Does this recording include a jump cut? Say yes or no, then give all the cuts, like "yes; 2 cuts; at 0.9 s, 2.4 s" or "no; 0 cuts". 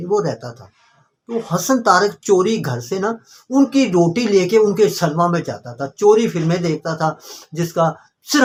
no; 0 cuts